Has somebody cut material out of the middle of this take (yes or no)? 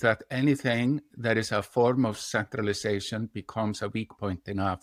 no